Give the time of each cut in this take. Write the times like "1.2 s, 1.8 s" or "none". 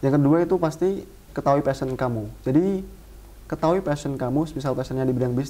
1.3 s